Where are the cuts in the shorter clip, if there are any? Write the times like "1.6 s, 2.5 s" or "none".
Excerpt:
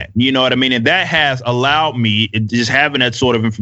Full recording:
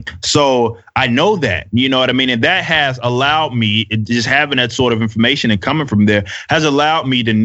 none